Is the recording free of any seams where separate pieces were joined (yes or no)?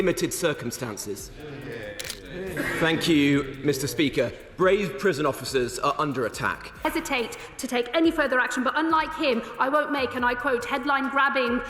no